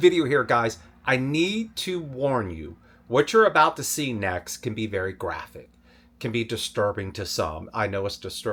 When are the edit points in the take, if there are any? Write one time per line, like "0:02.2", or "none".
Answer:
none